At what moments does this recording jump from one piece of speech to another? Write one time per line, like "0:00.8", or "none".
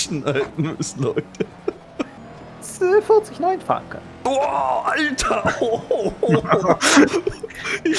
0:02.3